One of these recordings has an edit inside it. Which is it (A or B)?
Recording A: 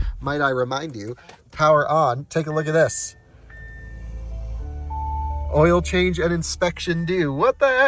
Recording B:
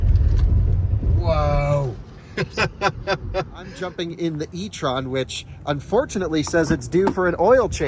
B